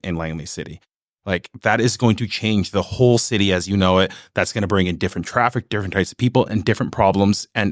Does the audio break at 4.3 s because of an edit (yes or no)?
no